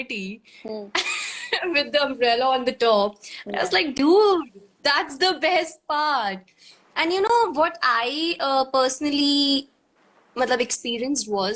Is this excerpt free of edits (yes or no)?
yes